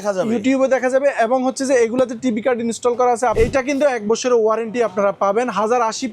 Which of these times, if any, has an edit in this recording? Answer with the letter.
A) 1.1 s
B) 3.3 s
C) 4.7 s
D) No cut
B